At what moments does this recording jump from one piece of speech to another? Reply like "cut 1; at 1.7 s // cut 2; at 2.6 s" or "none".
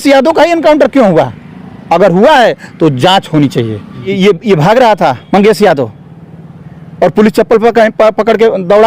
cut 1; at 4.1 s